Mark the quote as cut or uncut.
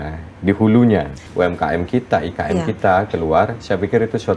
cut